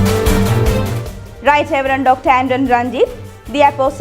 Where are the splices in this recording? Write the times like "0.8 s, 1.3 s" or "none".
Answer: 0.9 s